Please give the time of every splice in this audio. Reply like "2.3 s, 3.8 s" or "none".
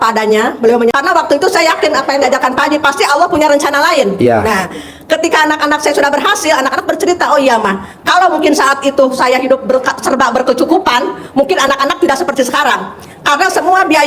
0.9 s